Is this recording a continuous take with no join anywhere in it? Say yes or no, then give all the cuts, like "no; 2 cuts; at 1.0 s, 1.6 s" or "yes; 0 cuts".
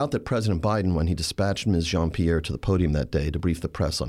yes; 0 cuts